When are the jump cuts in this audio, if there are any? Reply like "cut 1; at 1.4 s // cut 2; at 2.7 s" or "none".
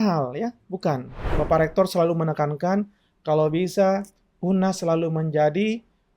cut 1; at 1.3 s